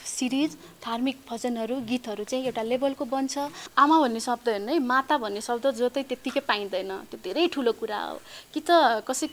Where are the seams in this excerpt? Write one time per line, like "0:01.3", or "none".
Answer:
0:03.6